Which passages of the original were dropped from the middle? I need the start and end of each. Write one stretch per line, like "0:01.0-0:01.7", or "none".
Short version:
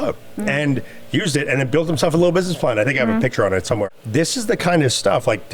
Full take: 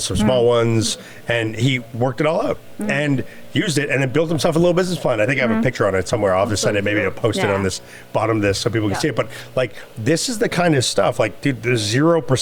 0:06.3-0:09.8